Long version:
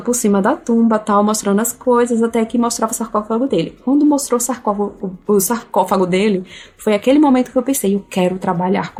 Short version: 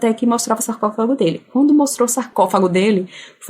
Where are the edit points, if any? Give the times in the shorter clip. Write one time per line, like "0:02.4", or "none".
0:02.3